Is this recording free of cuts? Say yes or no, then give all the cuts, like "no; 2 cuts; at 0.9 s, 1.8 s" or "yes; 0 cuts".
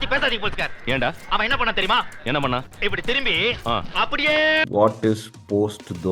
no; 1 cut; at 4.6 s